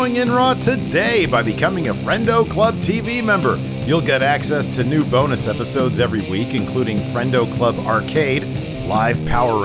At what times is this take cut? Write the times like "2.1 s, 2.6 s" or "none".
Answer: none